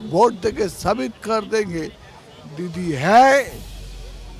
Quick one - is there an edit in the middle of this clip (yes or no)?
no